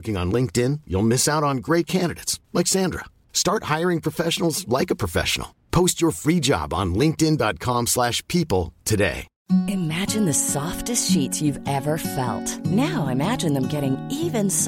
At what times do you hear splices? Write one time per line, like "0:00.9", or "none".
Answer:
0:09.3